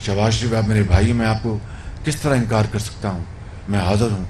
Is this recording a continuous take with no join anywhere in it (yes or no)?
yes